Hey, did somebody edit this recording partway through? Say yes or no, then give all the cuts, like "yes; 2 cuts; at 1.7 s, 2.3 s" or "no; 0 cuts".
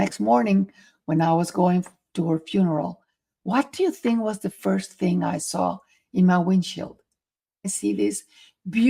yes; 1 cut; at 7.7 s